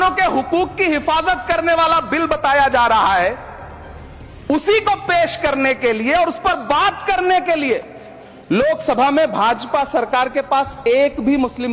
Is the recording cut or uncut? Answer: uncut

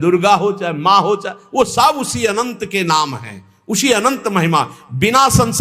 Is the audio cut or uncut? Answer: uncut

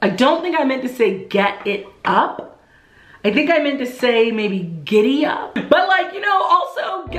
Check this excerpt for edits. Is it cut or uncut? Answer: cut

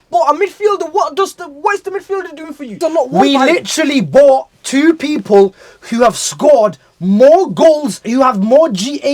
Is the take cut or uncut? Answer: cut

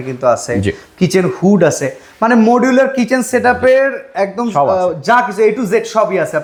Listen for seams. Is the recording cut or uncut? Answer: uncut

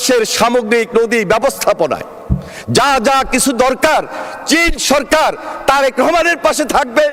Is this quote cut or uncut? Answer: uncut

